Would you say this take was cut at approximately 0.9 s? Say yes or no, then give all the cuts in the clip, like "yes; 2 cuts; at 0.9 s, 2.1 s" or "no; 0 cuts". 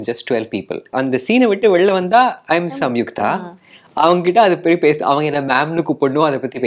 yes; 1 cut; at 0.9 s